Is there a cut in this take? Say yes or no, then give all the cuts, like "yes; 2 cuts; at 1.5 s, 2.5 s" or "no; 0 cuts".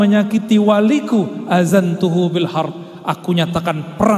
no; 0 cuts